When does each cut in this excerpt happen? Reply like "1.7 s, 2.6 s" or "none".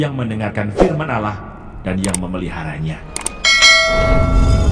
none